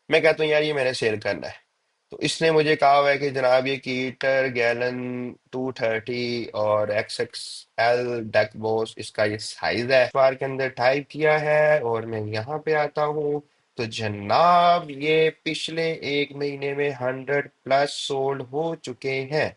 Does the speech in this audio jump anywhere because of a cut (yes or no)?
yes